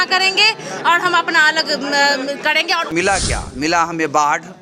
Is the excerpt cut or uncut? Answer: cut